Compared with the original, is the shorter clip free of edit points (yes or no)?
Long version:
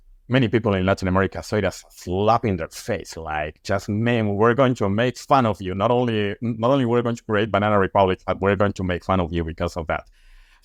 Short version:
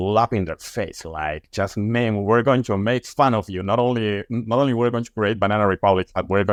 yes